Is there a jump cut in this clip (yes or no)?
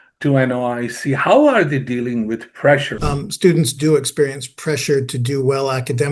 yes